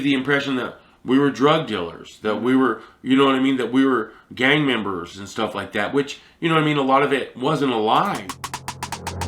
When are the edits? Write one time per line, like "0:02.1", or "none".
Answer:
0:08.3